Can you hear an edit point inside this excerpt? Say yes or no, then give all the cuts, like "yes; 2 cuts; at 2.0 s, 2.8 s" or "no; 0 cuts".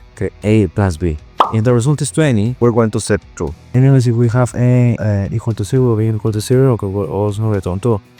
yes; 1 cut; at 5.0 s